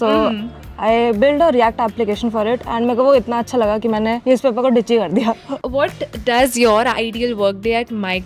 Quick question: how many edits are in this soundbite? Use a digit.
1